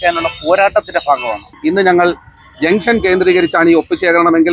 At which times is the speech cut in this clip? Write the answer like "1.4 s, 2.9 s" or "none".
1.5 s